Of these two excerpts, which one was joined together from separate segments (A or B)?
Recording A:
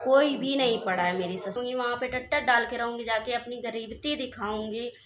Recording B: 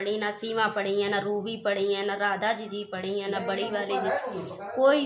A